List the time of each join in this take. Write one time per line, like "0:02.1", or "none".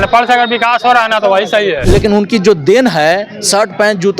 0:01.8